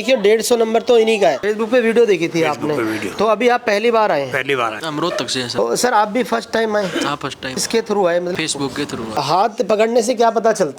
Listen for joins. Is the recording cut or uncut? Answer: cut